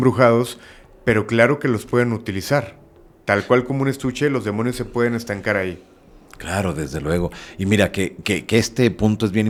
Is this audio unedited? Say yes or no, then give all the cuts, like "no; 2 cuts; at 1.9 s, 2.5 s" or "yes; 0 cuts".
yes; 0 cuts